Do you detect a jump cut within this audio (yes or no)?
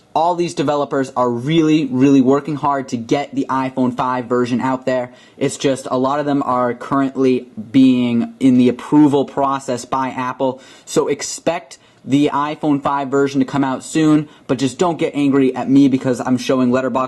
yes